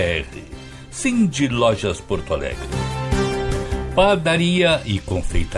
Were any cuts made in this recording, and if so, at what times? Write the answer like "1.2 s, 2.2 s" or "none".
none

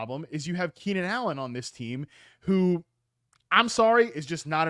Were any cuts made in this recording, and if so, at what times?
none

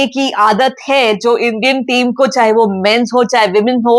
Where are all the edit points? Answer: none

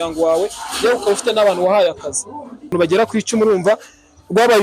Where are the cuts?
2.7 s

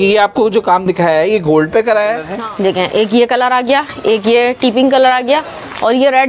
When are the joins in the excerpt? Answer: 2.4 s

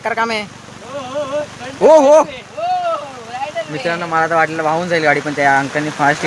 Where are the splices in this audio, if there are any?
none

